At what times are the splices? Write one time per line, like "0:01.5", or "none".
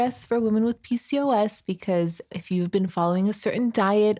0:02.3